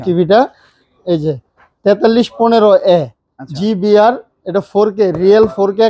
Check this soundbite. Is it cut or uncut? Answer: uncut